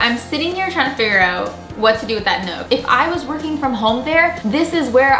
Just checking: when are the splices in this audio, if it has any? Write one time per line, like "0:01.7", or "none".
0:02.6